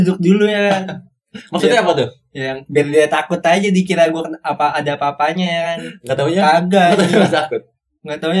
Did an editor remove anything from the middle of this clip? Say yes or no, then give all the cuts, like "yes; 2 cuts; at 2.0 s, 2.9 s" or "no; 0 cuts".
no; 0 cuts